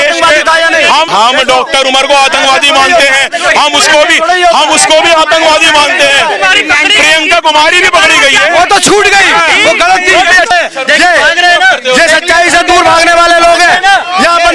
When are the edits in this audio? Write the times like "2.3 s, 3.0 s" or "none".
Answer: 1.1 s, 10.5 s